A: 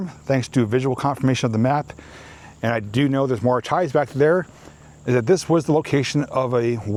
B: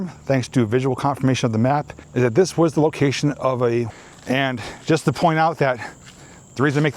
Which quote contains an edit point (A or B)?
B